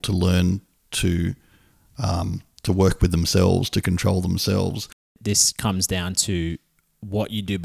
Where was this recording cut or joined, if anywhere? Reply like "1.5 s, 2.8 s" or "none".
5.2 s

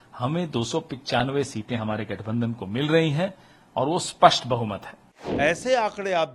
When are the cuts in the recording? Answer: 5.2 s

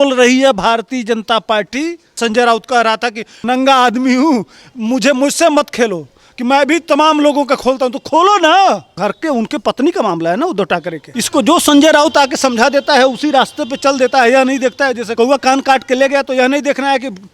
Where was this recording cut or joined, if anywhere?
2.2 s, 3.3 s, 9.0 s, 11.1 s

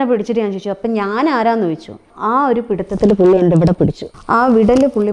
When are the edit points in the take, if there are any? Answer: 2.1 s, 4.1 s

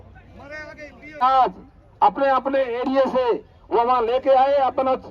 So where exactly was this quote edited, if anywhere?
1.2 s

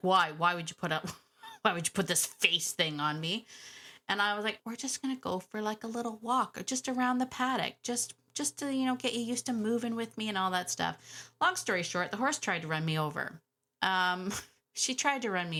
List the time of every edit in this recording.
none

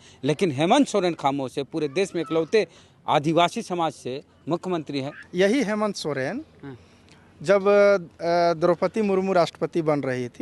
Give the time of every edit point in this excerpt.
5.2 s

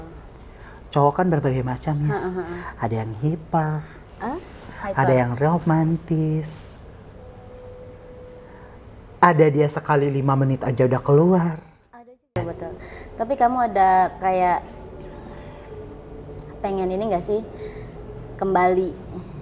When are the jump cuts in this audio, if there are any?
12.1 s

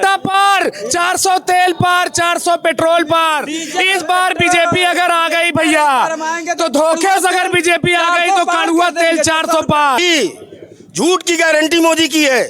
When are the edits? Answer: 10.0 s

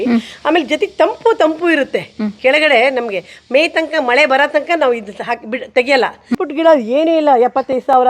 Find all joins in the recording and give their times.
6.3 s

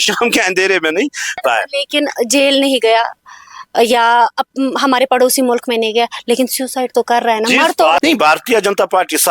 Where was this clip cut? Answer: 1.4 s, 8.0 s

